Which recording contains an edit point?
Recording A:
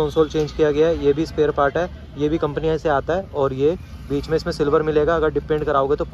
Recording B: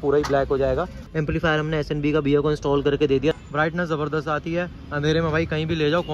B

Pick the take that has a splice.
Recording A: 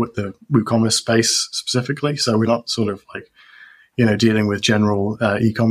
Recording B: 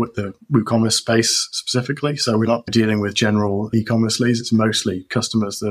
B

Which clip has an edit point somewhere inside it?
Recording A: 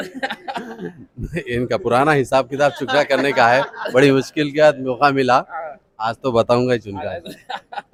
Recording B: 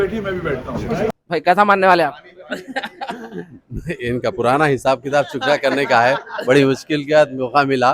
B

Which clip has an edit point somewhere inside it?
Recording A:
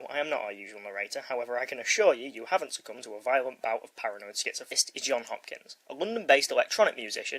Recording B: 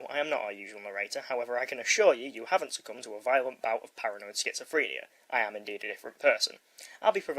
B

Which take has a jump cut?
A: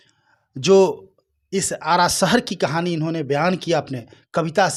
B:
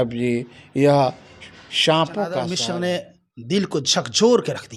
B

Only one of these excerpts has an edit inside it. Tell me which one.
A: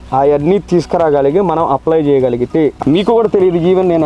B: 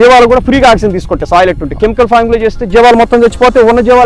A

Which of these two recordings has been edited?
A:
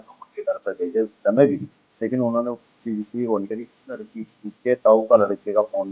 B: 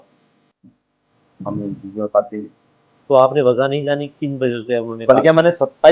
A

